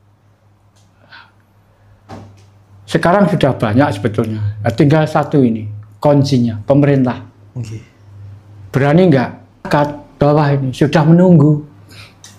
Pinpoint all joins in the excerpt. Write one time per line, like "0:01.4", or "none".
0:09.7